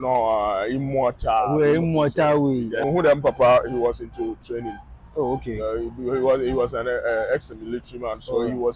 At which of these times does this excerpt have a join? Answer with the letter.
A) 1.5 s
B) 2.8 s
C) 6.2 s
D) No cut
B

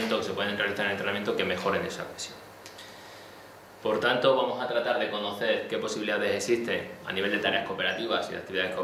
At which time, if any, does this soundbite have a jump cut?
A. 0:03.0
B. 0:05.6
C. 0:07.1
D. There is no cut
D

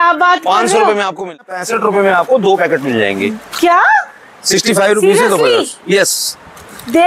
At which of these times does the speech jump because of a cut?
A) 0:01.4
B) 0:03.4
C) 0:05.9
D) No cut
A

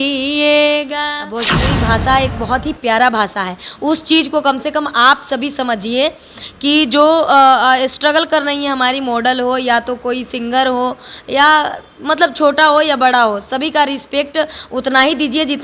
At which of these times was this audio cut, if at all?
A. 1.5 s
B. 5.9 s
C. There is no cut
A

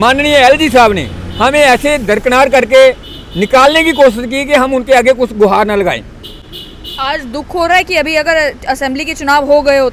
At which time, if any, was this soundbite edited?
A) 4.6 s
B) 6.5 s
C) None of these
C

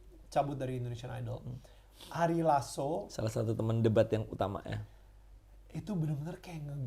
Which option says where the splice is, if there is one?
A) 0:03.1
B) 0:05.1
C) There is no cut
C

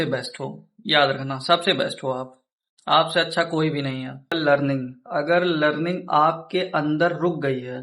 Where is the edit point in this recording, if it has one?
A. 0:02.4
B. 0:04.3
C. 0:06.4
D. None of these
B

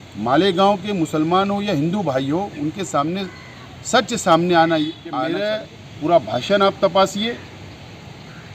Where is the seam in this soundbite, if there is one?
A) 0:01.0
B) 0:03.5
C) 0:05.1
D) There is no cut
C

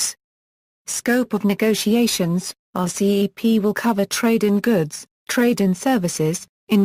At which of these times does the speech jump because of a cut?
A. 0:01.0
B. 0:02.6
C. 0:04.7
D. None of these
D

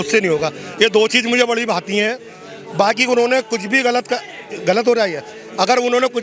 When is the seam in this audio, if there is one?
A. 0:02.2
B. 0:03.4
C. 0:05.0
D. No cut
D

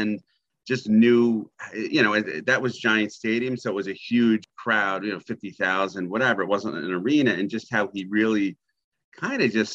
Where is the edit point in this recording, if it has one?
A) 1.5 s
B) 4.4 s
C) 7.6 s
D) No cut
B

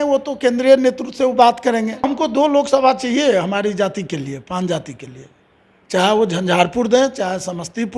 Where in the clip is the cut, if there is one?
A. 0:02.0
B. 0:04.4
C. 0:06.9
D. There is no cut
A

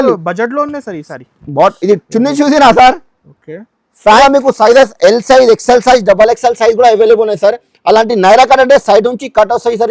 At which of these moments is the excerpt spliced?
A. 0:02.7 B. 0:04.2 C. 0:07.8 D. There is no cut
B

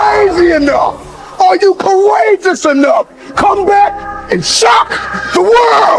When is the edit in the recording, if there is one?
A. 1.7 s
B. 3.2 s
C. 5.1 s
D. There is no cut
B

